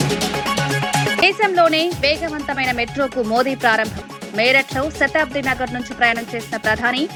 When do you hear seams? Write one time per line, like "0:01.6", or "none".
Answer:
none